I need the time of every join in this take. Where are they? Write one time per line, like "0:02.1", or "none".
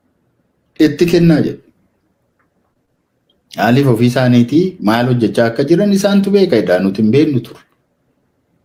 none